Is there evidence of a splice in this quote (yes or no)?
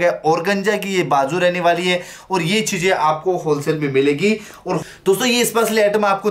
yes